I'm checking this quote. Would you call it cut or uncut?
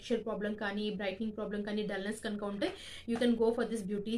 uncut